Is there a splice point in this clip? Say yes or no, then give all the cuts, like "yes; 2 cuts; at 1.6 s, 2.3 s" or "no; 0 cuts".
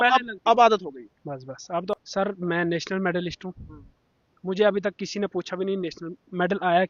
yes; 1 cut; at 1.9 s